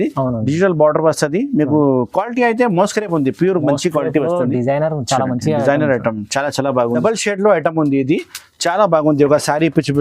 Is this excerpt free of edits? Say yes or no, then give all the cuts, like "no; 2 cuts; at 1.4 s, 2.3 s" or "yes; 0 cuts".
no; 1 cut; at 7.0 s